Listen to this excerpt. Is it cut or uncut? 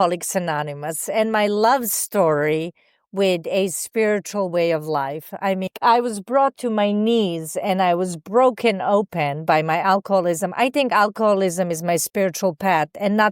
cut